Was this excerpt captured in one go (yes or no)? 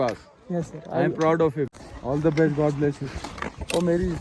no